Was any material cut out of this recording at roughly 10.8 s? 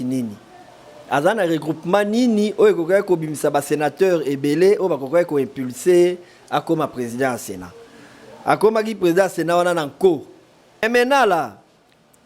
yes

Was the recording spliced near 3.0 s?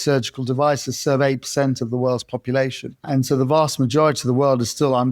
yes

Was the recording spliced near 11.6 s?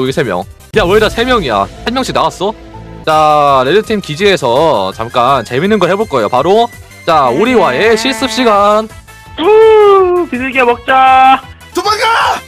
yes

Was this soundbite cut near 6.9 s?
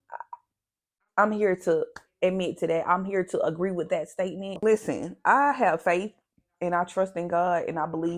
no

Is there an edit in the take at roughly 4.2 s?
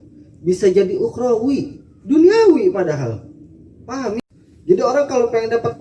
yes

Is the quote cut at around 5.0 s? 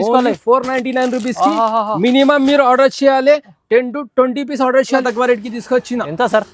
yes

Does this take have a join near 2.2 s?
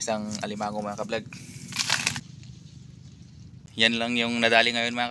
yes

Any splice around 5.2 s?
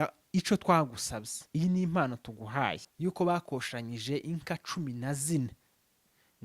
no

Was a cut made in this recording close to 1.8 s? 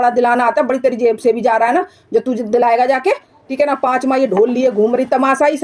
no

